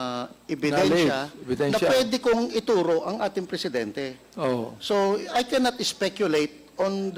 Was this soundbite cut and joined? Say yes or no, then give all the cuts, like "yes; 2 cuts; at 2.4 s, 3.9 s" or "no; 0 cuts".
no; 0 cuts